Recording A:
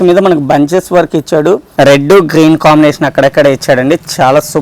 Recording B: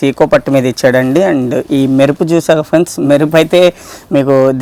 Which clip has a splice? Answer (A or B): A